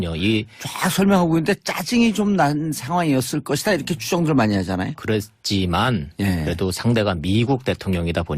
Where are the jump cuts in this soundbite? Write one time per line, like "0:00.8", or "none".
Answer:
0:02.1